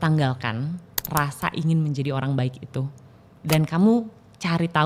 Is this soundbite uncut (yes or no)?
yes